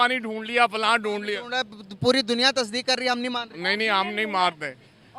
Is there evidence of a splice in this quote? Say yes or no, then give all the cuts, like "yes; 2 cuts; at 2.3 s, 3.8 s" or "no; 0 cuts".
no; 0 cuts